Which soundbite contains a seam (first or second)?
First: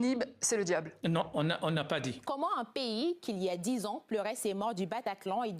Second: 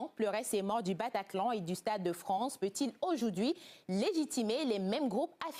first